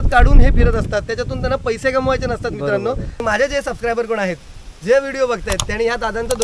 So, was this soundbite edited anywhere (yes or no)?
yes